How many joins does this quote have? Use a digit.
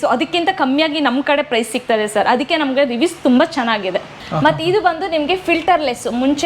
1